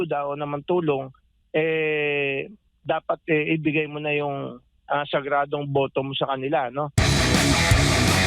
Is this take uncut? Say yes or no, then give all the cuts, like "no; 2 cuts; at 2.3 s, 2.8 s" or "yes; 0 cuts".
no; 1 cut; at 6.9 s